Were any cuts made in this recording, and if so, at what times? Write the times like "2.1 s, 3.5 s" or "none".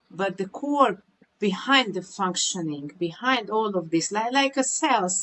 none